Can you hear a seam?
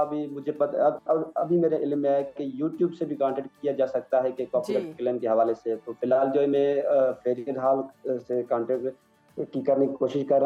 no; 0 cuts

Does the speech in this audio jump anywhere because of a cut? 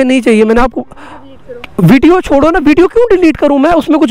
no; 0 cuts

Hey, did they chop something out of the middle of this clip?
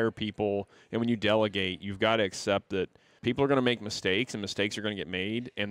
yes; 1 cut; at 3.1 s

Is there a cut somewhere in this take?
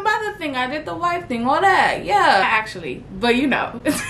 no; 0 cuts

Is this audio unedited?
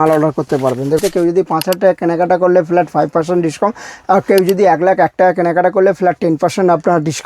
no; 1 cut; at 1.0 s

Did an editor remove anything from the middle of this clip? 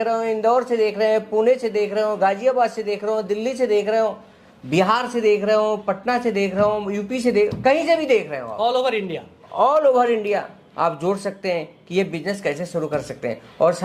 no; 0 cuts

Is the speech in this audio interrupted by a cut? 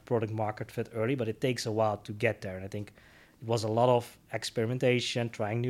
no; 0 cuts

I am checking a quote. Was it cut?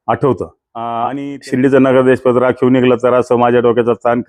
yes; 1 cut; at 1.0 s

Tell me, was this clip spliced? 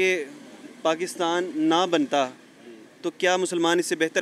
no; 0 cuts

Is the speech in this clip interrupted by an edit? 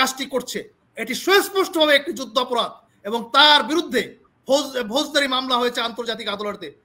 no; 0 cuts

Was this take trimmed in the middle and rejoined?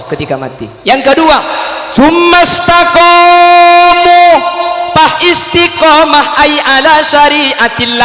no; 0 cuts

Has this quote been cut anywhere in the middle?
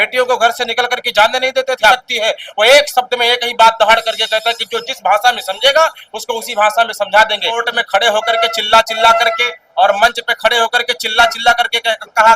yes; 2 cuts; at 2.0 s, 7.7 s

